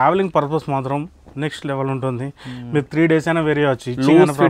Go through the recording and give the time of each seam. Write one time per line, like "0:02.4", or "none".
none